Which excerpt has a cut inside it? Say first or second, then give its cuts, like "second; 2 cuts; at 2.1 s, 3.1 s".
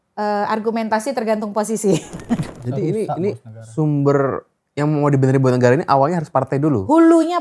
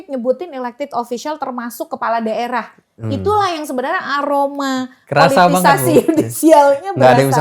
first; 1 cut; at 2.5 s